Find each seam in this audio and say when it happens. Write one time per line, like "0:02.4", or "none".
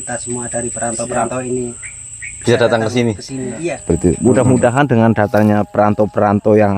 0:04.0